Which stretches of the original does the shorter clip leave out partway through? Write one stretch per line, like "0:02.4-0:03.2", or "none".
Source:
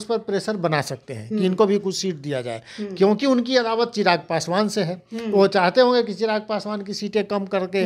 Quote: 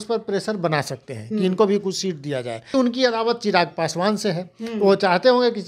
0:02.7-0:03.2

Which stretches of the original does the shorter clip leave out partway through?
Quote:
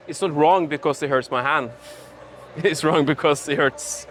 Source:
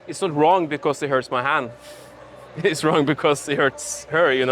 none

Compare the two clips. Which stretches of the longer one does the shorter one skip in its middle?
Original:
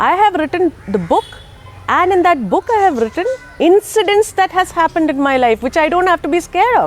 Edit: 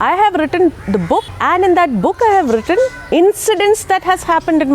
0:01.3-0:01.8

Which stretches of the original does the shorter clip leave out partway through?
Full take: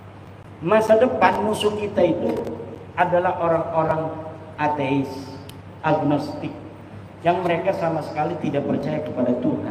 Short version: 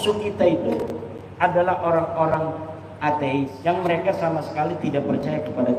0:05.1-0:07.1

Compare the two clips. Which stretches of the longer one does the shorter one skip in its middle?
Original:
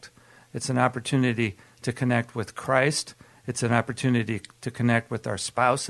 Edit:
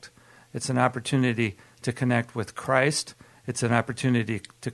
none

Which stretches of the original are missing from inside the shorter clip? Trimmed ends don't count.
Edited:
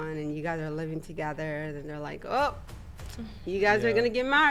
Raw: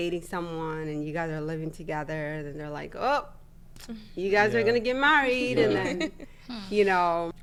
none

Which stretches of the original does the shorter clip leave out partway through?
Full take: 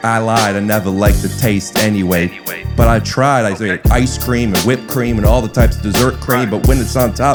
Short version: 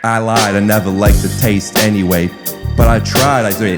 none

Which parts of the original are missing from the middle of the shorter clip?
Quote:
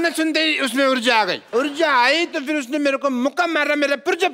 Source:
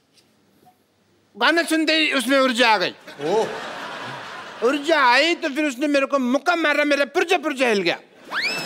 0:02.9-0:04.5

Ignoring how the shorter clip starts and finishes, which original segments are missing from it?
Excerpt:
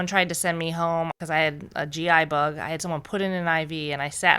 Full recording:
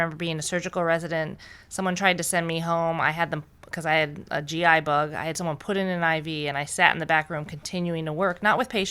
0:03.0-0:03.7

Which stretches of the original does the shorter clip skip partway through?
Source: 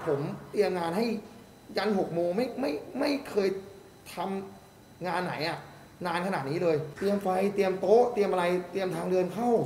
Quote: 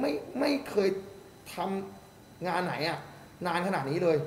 none

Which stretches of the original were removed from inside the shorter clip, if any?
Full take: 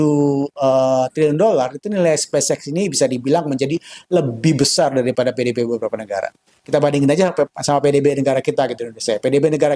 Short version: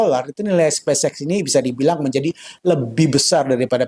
none

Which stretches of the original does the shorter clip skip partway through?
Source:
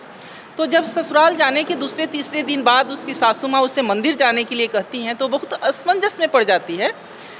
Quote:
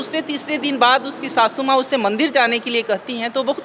none

